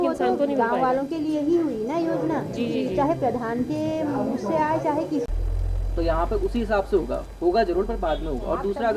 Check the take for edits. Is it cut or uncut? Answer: cut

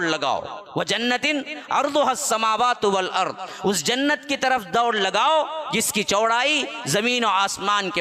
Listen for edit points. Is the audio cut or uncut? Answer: uncut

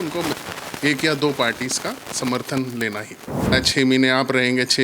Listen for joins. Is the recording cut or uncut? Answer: cut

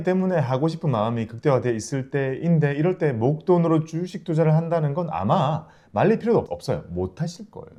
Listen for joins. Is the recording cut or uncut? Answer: uncut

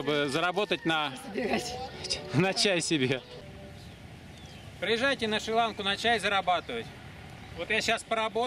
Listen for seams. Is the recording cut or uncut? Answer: cut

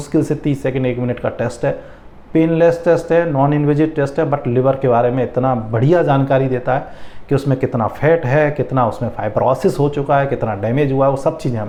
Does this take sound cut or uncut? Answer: uncut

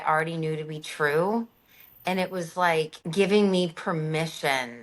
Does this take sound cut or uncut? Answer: cut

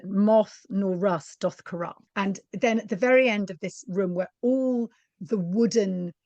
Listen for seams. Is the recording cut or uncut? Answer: cut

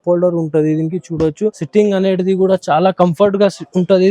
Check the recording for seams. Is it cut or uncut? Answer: cut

